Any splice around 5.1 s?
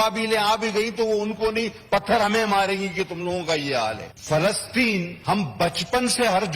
yes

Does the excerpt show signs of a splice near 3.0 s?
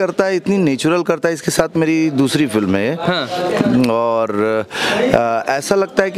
no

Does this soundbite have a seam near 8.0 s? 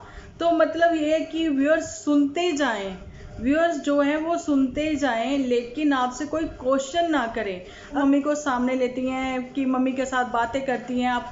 yes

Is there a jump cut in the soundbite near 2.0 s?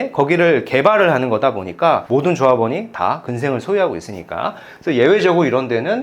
yes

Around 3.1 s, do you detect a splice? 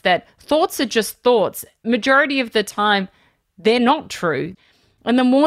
no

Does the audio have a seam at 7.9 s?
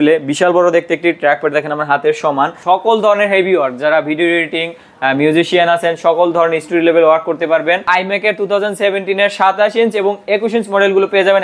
yes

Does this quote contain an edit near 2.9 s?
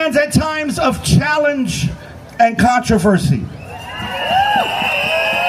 no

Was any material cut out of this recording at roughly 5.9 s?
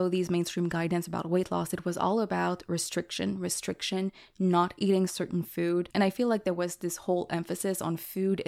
yes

